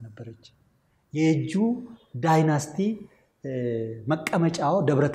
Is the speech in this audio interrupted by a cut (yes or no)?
no